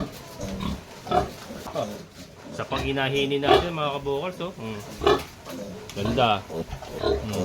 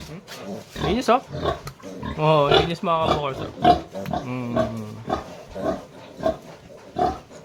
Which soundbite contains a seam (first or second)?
first